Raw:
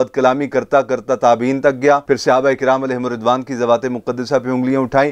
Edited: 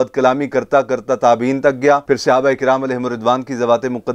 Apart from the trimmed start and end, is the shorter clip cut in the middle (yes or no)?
no